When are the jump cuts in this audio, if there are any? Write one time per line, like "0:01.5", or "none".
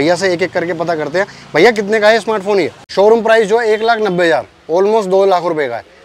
0:02.8